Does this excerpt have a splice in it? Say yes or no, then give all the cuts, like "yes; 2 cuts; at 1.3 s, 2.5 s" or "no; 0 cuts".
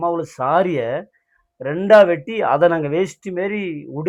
no; 0 cuts